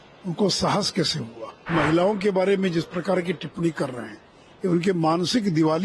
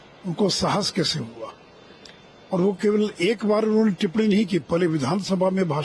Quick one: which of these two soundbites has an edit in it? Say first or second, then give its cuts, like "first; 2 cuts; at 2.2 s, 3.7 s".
first; 1 cut; at 1.7 s